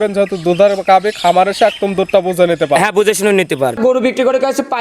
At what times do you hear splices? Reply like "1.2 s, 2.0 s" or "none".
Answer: 3.8 s